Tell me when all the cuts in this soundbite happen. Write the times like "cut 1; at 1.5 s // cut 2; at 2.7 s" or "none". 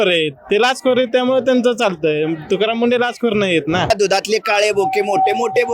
cut 1; at 3.9 s